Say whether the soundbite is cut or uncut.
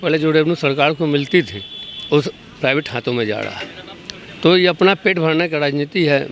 uncut